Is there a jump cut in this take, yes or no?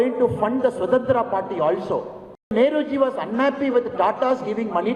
yes